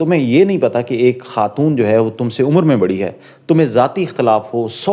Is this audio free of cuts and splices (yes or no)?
yes